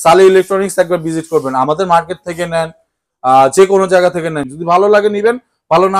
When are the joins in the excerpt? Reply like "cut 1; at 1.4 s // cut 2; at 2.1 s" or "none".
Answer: cut 1; at 4.5 s